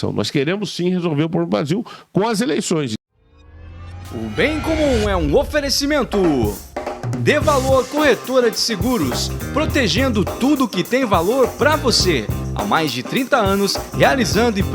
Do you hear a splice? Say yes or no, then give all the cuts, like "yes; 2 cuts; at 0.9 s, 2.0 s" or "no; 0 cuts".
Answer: yes; 1 cut; at 2.9 s